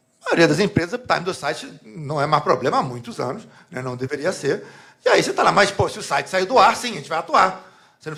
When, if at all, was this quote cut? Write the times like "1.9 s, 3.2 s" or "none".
none